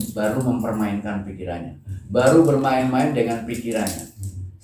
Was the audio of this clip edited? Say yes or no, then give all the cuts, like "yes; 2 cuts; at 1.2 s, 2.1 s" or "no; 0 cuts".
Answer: no; 0 cuts